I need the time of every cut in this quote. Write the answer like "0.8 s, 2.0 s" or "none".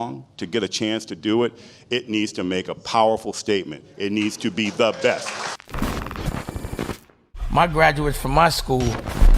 5.6 s